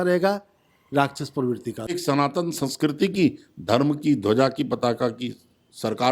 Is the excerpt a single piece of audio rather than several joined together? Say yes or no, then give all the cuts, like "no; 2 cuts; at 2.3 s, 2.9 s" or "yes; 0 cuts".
no; 1 cut; at 1.9 s